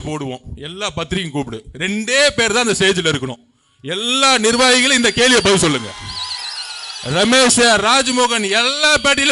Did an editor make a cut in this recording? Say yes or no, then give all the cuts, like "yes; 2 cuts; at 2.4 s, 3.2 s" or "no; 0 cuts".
no; 0 cuts